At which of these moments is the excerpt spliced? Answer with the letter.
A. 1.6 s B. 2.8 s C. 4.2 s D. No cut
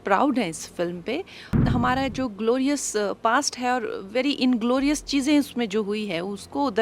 A